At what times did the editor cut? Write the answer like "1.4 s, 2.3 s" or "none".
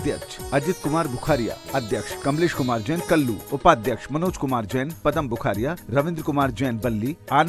2.1 s, 3.4 s